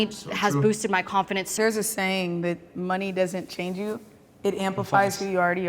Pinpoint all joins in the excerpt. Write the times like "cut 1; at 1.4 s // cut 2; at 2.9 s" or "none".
cut 1; at 1.5 s